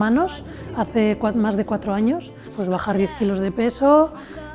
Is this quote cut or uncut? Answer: cut